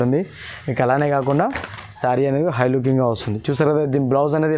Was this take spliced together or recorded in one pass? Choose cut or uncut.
uncut